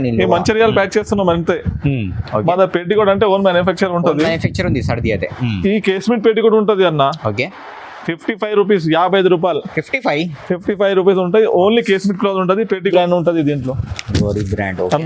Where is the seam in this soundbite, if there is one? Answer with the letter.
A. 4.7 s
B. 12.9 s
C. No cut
B